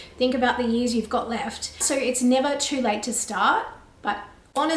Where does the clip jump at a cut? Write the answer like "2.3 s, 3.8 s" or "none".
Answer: none